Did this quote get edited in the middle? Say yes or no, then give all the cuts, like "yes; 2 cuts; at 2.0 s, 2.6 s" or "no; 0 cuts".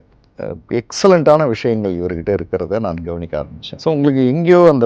yes; 1 cut; at 3.6 s